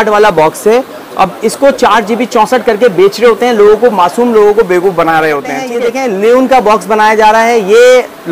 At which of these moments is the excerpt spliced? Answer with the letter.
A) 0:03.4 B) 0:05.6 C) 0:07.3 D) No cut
B